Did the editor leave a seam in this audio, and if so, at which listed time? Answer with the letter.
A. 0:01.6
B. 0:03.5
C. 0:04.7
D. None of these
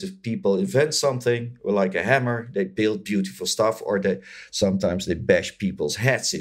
D